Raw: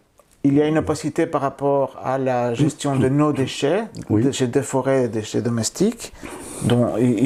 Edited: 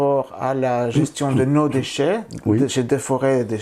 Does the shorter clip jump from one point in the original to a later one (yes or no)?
no